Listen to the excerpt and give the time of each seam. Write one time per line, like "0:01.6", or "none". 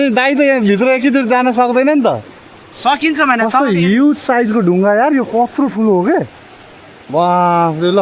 none